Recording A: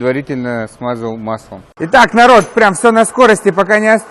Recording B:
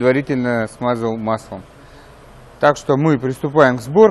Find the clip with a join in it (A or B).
A